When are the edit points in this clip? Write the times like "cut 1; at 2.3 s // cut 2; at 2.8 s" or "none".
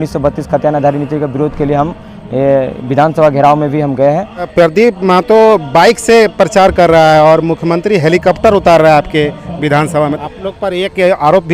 cut 1; at 4.5 s // cut 2; at 10.2 s